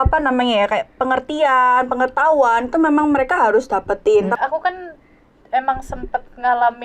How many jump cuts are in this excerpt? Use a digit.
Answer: 1